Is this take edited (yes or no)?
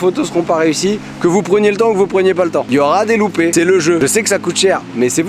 yes